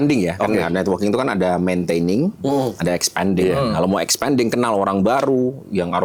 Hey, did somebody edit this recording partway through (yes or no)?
no